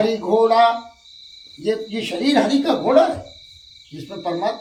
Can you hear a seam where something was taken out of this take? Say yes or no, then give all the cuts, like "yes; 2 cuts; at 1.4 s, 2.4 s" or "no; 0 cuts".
no; 0 cuts